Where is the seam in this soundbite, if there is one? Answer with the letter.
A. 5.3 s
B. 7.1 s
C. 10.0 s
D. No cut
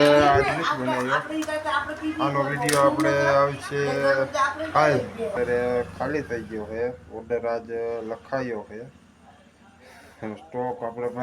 A